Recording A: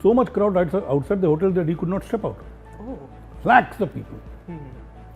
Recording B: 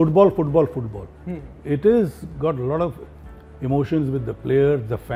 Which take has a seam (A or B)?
A